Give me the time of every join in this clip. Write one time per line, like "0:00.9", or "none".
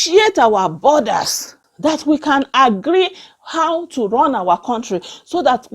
0:01.5

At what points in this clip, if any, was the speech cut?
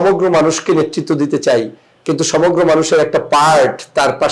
none

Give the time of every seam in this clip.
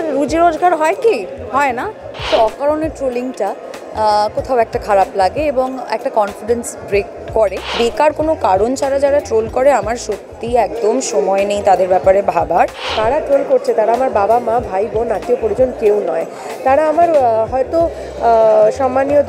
0:02.1
0:07.7
0:12.9

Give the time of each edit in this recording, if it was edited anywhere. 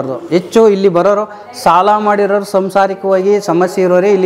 none

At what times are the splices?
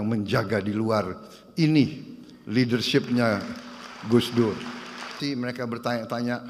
0:05.1

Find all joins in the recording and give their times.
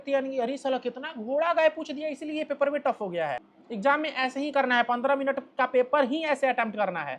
0:03.5

